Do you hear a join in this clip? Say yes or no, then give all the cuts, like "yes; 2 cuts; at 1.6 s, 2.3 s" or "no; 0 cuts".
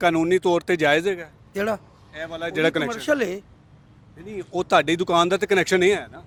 no; 0 cuts